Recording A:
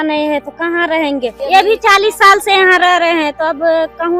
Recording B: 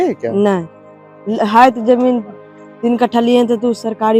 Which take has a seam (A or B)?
A